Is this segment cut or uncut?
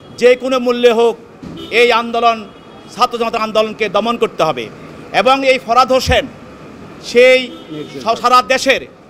uncut